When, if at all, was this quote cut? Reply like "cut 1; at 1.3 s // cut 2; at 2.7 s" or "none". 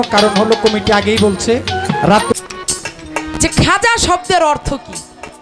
cut 1; at 2.3 s